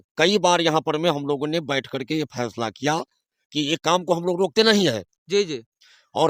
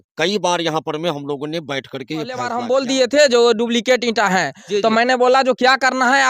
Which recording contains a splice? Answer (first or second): second